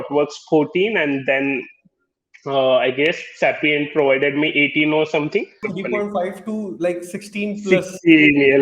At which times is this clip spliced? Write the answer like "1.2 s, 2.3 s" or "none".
5.7 s